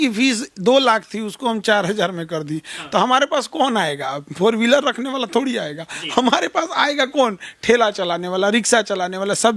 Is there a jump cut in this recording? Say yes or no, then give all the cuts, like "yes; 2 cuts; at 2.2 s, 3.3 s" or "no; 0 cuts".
no; 0 cuts